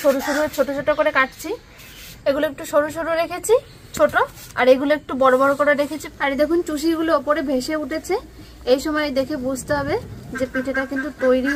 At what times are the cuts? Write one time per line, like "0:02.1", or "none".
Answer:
0:02.1
0:06.0